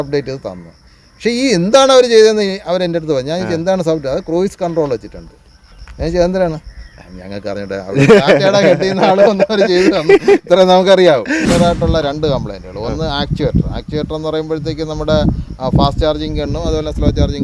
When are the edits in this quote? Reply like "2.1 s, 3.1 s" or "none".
11.5 s